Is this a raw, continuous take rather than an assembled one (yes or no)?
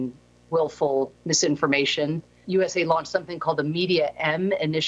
no